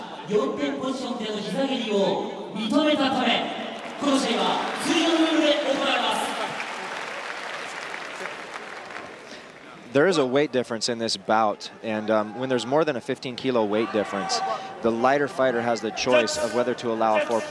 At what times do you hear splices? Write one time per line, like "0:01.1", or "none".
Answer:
0:14.6